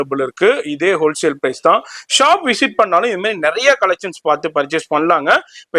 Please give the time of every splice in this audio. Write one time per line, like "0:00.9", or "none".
none